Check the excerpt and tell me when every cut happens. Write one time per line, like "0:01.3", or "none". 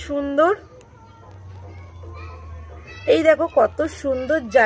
0:02.9

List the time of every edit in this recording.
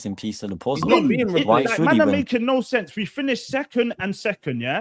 0:02.0

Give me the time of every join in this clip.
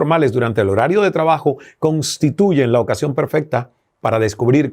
none

